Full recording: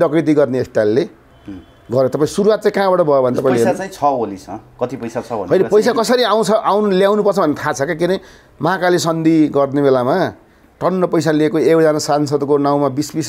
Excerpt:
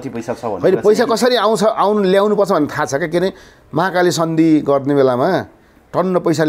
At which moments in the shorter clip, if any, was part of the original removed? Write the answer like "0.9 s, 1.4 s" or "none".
none

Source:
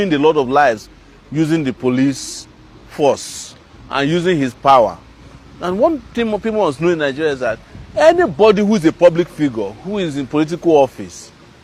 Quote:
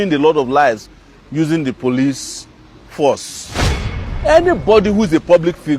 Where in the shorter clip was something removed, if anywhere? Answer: 3.9 s

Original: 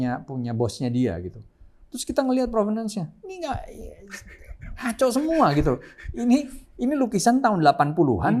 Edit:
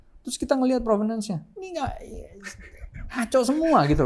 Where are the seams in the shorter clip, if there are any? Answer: none

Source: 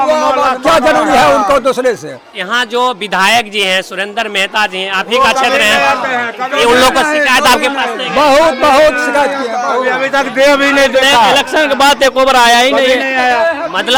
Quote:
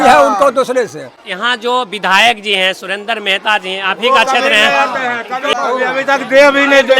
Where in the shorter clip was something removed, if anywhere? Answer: 5.5 s

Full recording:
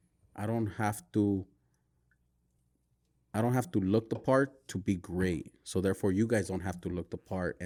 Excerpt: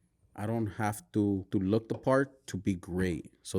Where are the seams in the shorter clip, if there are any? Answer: 1.5 s

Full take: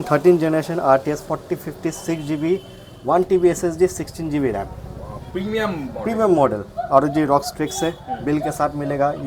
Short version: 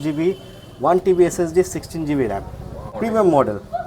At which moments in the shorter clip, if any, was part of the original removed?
2.9 s

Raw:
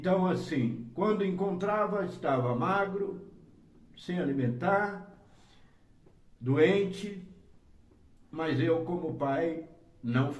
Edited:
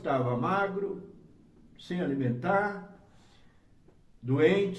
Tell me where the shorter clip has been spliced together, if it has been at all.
none

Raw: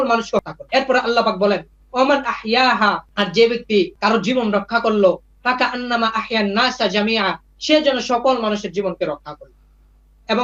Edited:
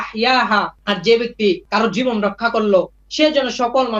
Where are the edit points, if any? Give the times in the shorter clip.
3.0 s

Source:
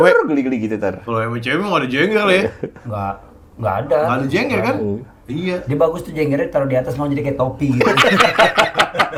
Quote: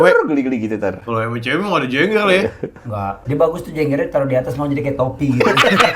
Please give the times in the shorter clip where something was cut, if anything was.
3.2 s

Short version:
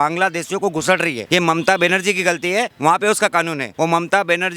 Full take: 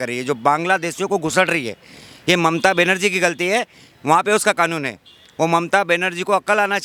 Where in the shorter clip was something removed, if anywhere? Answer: 1.2 s, 2.7 s, 3.6 s

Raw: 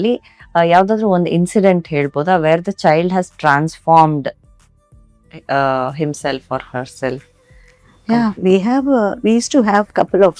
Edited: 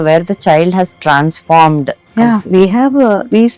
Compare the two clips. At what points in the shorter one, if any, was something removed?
2.0 s

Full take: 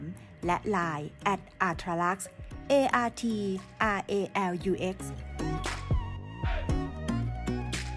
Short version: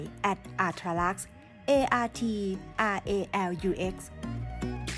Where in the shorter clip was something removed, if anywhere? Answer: 4.1 s

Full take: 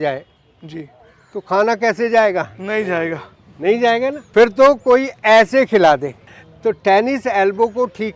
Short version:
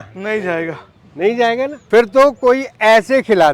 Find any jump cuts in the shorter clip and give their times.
none

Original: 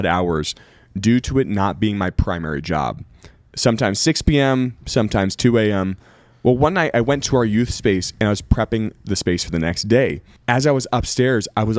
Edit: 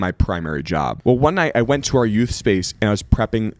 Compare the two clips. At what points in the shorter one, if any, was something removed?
0.9 s

